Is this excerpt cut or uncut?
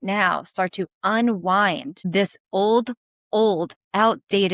cut